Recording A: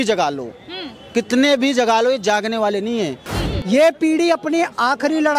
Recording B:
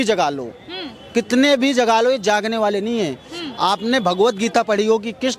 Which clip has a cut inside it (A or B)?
A